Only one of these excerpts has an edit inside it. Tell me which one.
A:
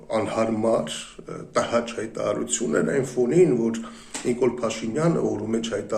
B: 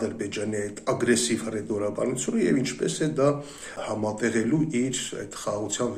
B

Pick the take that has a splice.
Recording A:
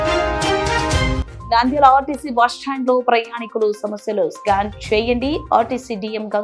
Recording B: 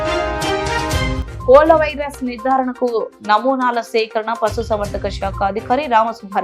A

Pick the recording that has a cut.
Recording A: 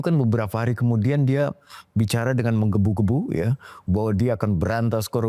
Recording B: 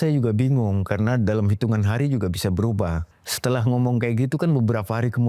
B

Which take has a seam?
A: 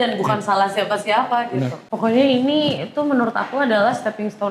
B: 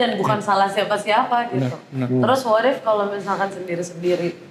A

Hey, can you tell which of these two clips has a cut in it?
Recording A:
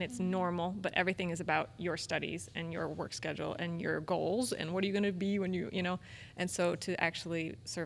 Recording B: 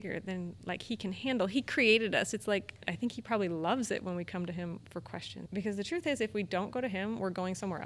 B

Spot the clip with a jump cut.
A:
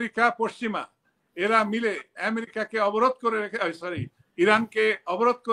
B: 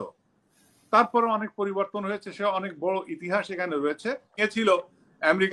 B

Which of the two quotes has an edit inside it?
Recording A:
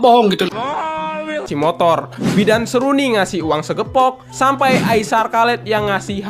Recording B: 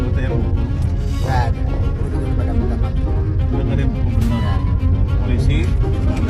A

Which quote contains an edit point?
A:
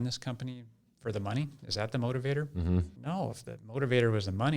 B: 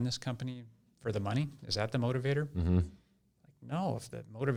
A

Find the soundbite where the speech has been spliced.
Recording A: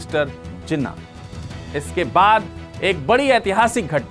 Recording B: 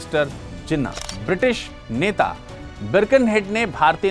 B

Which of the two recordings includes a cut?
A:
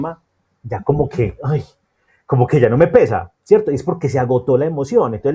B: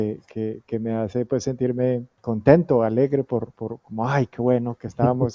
B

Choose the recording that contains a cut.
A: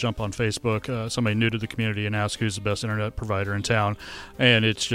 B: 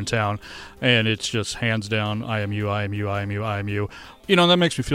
B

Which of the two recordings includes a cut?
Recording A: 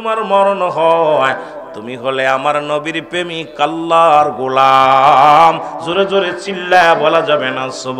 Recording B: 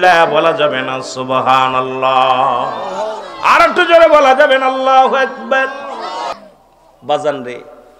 B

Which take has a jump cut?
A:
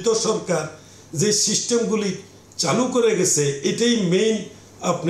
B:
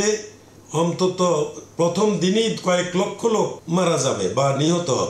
B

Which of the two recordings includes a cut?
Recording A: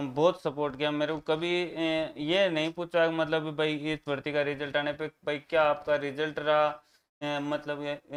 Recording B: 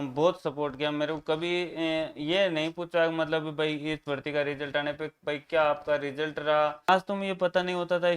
B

